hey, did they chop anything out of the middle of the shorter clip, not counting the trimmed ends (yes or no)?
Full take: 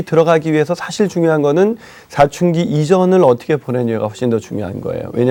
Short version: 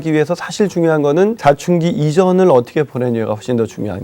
yes